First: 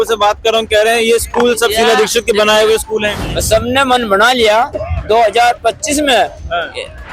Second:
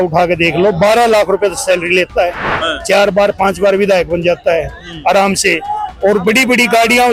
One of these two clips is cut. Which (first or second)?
first